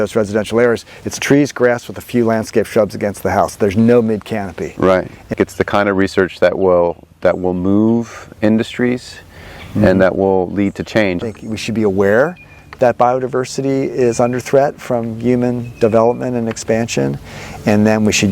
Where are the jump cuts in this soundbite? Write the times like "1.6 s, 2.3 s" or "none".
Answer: 5.3 s, 11.2 s